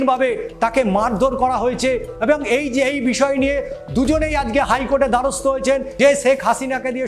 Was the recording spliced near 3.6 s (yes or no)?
no